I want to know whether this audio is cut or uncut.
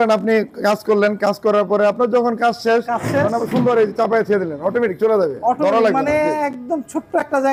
uncut